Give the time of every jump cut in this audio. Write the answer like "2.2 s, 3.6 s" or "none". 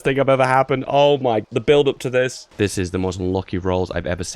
1.4 s